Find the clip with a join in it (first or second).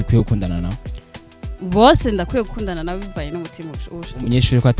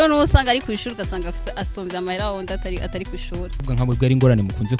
second